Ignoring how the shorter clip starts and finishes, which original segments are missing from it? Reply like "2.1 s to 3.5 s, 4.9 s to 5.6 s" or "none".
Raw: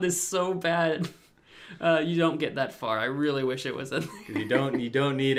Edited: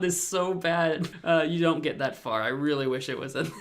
1.1 s to 1.7 s